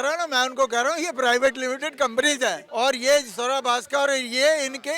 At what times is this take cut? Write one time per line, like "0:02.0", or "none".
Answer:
0:02.6